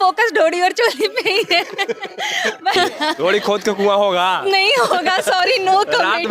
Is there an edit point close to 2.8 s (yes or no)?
yes